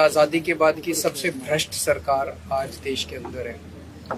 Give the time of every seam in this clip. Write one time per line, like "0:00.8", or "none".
none